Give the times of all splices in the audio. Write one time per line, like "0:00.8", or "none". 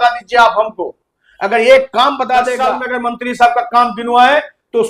0:02.6